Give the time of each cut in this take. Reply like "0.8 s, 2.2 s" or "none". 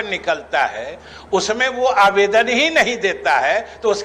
none

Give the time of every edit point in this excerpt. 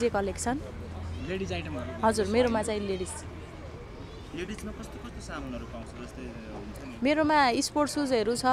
none

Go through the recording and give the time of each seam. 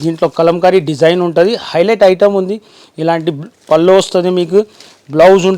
none

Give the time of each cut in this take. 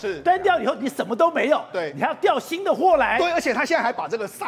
none

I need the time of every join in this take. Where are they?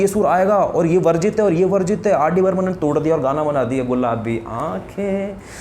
none

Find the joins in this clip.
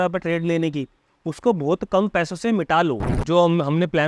3.1 s

